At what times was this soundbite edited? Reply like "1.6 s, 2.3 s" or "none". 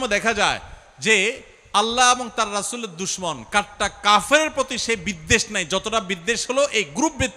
none